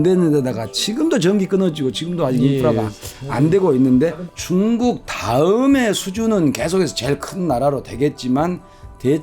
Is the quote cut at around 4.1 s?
yes; 1 cut; at 4.1 s

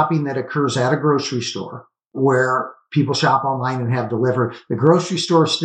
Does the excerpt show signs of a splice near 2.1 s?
yes; 1 cut; at 2.1 s

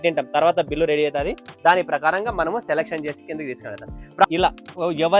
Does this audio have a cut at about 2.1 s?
no; 1 cut; at 4.2 s

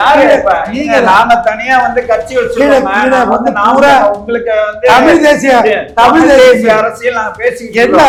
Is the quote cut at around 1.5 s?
no; 0 cuts

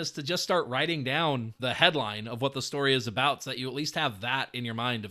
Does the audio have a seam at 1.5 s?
yes; 1 cut; at 1.5 s

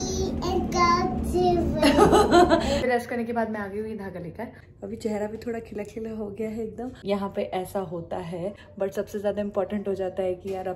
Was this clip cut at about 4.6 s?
yes; 4 cuts; at 2.9 s, 4.6 s, 7.0 s, 8.6 s

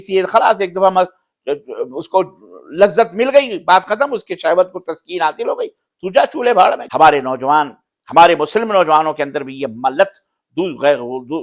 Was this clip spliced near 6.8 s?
yes; 1 cut; at 6.8 s

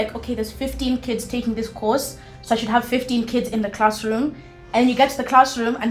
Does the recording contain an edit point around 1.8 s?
no; 0 cuts

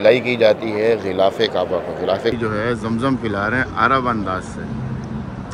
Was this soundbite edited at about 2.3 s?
yes; 1 cut; at 2.3 s

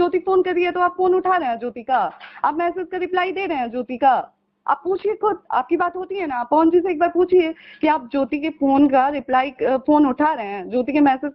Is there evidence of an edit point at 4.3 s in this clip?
no; 0 cuts

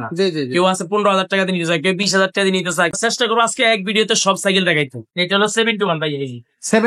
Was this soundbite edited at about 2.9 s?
yes; 2 cuts; at 2.9 s, 5.1 s

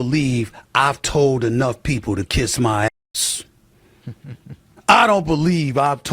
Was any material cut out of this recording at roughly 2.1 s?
no; 1 cut; at 4.7 s

